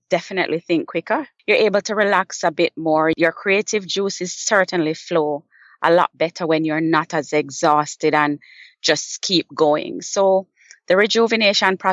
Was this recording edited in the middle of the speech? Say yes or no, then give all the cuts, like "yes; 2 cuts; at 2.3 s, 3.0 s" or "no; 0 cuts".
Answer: yes; 2 cuts; at 1.3 s, 3.1 s